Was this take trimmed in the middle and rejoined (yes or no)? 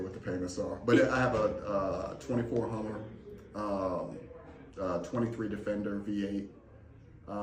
no